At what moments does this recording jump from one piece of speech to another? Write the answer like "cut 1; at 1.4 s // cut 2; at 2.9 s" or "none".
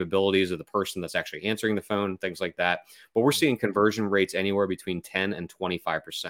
none